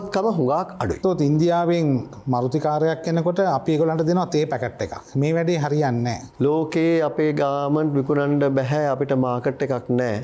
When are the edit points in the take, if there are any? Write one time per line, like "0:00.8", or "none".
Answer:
0:01.0
0:06.2